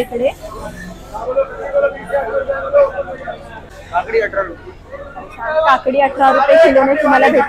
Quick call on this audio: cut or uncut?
uncut